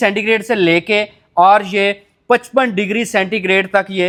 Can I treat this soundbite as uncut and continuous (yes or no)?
yes